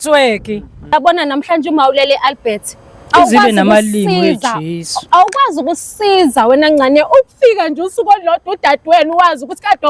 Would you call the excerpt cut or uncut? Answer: cut